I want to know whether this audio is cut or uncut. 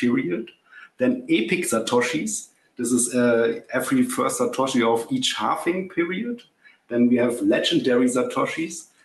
uncut